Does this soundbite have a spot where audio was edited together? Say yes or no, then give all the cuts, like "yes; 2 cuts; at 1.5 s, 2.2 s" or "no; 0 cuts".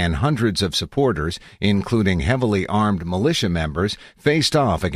yes; 1 cut; at 2.9 s